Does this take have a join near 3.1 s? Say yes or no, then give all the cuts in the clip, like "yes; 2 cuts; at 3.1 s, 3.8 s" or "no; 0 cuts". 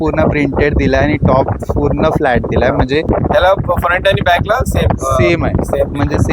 yes; 1 cut; at 3.1 s